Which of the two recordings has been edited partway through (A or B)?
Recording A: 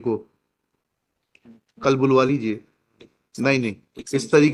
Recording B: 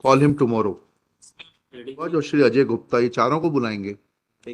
B